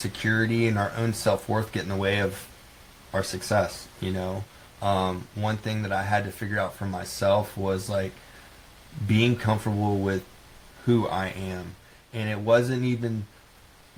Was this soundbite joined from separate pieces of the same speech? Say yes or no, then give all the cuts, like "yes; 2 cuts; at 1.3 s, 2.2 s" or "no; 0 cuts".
no; 0 cuts